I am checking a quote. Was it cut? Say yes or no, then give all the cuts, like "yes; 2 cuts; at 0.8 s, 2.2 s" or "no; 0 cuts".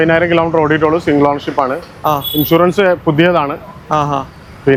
no; 0 cuts